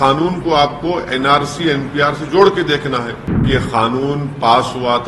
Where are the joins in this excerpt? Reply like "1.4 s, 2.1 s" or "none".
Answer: 3.4 s